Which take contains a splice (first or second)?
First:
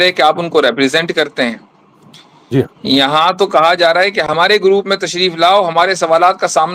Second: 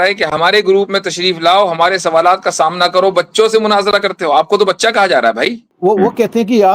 second